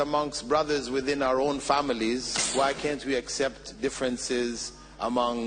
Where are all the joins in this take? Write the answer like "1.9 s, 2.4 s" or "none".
2.4 s